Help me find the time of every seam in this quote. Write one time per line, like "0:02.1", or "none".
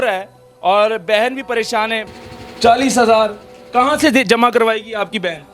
0:02.1